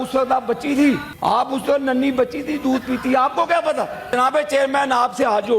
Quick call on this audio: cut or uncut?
cut